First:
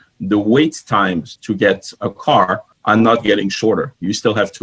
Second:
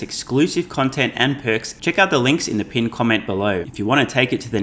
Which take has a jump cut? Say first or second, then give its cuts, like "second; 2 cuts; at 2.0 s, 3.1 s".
second; 2 cuts; at 1.7 s, 3.7 s